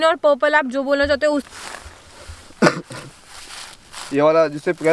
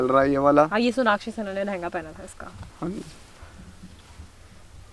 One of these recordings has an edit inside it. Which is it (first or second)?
first